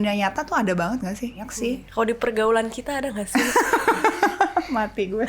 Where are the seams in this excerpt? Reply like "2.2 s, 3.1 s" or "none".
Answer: 1.5 s